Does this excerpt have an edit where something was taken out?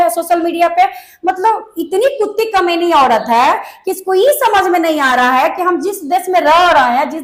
no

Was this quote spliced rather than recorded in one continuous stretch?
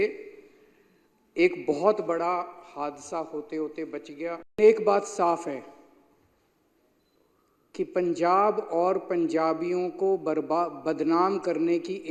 yes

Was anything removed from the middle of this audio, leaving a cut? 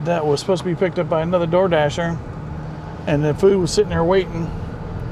no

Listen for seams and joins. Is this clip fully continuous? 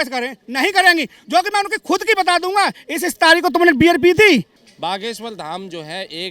no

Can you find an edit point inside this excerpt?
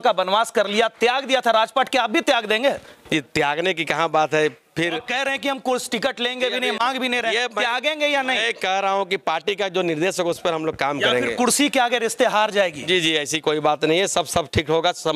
no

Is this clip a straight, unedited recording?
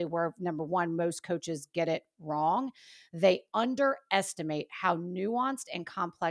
yes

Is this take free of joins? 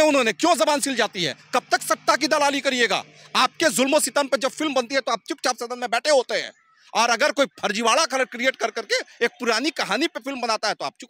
yes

